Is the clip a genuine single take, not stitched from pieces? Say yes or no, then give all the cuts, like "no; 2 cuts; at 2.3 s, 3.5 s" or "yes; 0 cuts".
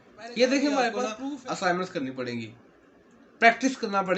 no; 1 cut; at 1.1 s